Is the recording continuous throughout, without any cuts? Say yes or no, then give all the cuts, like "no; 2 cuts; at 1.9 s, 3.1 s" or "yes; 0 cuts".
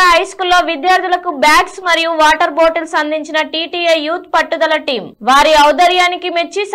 yes; 0 cuts